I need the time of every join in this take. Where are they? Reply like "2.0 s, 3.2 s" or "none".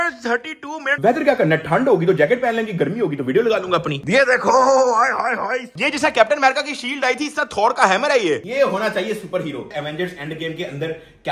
0.9 s, 4.0 s, 5.7 s, 8.5 s, 9.7 s